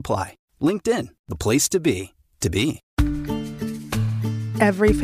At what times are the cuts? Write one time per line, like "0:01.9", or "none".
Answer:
0:02.8